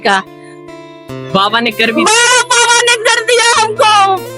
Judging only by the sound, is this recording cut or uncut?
uncut